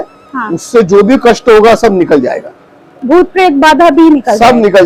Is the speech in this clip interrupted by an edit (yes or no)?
no